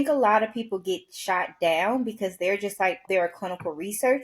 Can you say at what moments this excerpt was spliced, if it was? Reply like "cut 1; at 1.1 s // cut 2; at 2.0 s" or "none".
cut 1; at 3.0 s